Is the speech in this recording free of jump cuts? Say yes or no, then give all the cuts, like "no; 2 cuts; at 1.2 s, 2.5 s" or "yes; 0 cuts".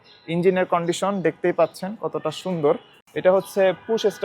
no; 1 cut; at 3.0 s